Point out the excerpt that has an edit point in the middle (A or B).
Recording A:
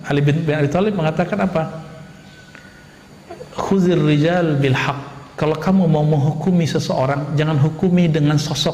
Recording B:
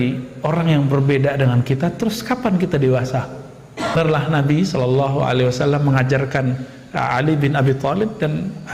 B